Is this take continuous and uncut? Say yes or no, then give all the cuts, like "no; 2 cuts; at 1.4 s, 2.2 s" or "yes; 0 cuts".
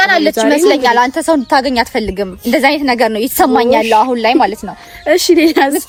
yes; 0 cuts